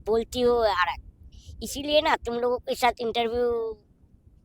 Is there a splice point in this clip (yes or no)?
no